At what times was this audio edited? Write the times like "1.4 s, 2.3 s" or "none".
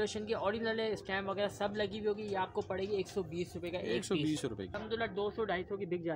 4.8 s